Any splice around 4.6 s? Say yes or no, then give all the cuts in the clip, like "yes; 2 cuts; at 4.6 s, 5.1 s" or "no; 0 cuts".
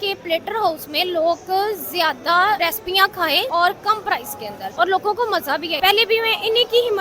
yes; 3 cuts; at 2.9 s, 4.6 s, 5.7 s